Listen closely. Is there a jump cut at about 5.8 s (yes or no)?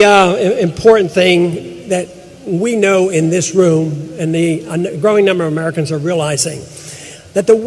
no